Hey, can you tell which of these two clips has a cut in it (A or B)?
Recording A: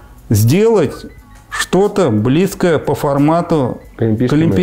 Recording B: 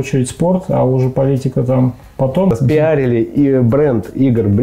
B